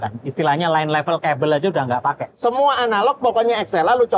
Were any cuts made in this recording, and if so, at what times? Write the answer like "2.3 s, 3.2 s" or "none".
2.3 s